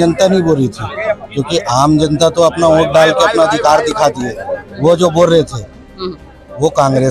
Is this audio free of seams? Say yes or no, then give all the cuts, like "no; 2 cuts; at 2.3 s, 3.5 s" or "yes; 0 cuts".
yes; 0 cuts